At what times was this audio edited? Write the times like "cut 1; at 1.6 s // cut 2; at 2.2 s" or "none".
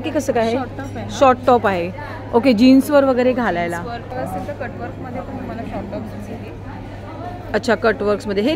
cut 1; at 4.1 s